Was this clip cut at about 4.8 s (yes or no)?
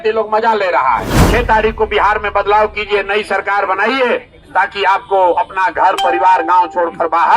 no